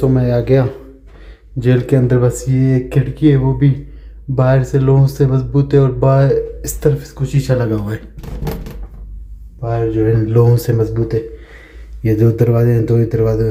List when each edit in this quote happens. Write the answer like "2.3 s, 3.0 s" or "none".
none

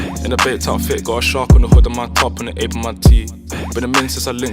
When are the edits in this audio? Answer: none

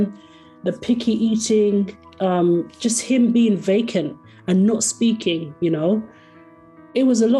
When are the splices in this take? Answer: none

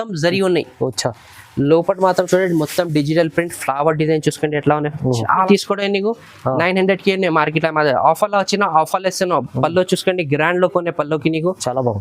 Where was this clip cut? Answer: 5.5 s

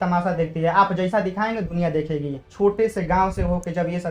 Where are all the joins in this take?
2.5 s

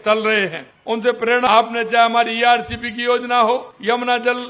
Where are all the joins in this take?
1.5 s

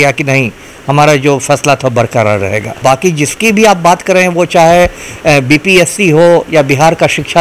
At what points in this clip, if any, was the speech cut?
2.8 s

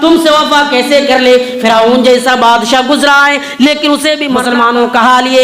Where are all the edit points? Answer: 4.4 s

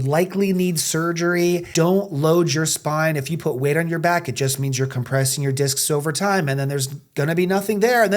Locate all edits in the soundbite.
1.7 s

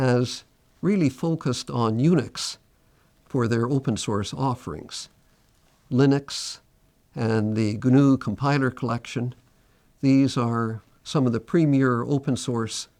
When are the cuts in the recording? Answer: none

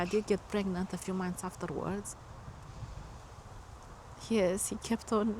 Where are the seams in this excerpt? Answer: none

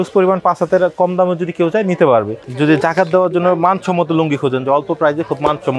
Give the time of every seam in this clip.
2.4 s

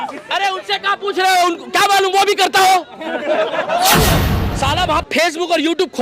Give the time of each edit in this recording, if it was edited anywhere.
4.2 s

